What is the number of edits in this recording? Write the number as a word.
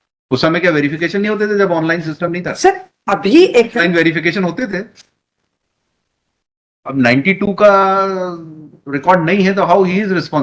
zero